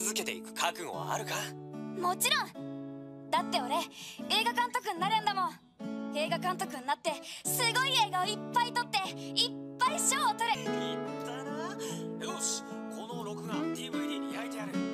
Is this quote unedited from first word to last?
yes; 0 cuts

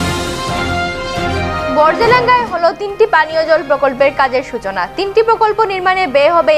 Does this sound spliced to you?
no; 0 cuts

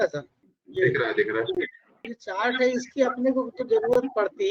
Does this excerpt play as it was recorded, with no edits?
no; 1 cut; at 2.1 s

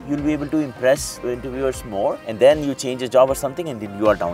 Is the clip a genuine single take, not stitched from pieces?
no; 2 cuts; at 1.2 s, 2.2 s

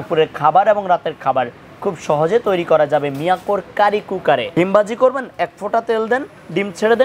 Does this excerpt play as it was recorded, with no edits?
no; 1 cut; at 4.5 s

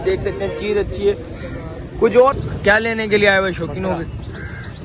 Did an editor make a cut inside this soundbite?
yes; 1 cut; at 2.4 s

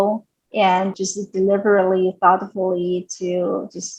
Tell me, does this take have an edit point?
no; 0 cuts

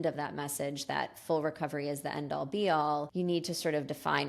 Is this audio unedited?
no; 1 cut; at 3.1 s

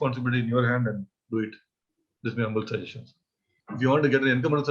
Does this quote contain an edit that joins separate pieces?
yes; 1 cut; at 3.6 s

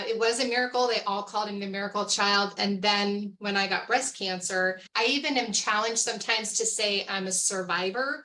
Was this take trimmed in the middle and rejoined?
yes; 2 cuts; at 2.5 s, 4.8 s

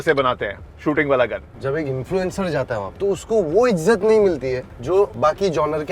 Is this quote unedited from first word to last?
no; 3 cuts; at 1.5 s, 2.9 s, 4.8 s

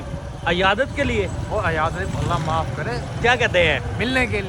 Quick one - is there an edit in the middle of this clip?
no; 0 cuts

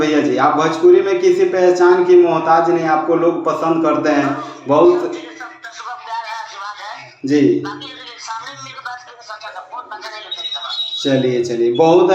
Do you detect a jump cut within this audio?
no; 0 cuts

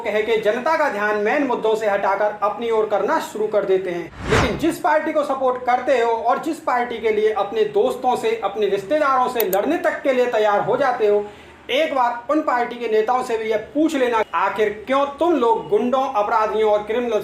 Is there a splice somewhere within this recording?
yes; 1 cut; at 4.1 s

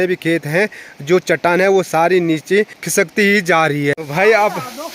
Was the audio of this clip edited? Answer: yes; 2 cuts; at 2.8 s, 3.9 s

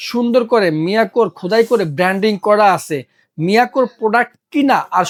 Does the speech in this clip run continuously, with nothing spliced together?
yes; 0 cuts

